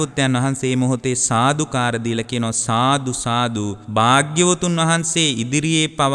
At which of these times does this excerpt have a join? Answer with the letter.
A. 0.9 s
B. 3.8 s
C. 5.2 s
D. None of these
B